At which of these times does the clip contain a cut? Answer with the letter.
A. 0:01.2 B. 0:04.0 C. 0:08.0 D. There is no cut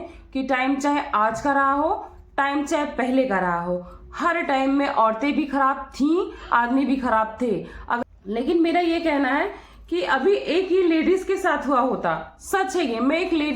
C